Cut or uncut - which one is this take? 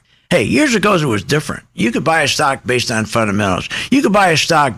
uncut